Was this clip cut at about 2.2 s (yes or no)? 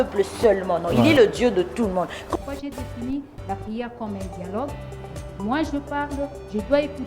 yes